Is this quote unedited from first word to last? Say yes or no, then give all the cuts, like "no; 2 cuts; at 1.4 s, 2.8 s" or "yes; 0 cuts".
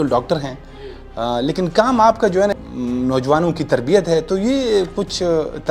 no; 1 cut; at 2.5 s